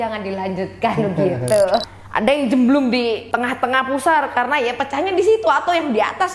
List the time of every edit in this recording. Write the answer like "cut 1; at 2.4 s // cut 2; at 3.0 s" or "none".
cut 1; at 1.9 s // cut 2; at 3.2 s